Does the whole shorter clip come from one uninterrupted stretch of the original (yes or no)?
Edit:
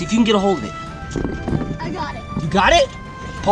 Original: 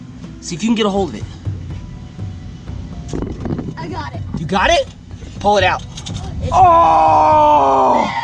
no